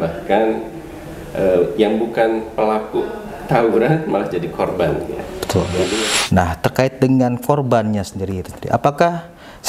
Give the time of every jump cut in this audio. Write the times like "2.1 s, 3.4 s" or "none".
5.9 s